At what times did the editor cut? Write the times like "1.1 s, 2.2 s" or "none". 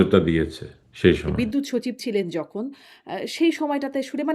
1.3 s